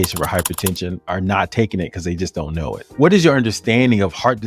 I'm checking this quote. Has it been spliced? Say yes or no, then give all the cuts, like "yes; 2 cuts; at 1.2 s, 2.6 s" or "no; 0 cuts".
yes; 2 cuts; at 1.0 s, 2.9 s